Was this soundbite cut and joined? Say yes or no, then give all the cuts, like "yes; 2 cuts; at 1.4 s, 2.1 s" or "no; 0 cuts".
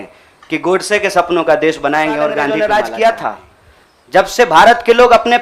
yes; 1 cut; at 2.5 s